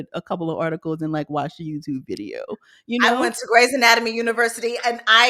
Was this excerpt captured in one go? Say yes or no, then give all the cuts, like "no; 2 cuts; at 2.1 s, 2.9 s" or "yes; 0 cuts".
yes; 0 cuts